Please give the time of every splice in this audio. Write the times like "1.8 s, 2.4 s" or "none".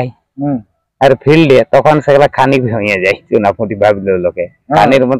none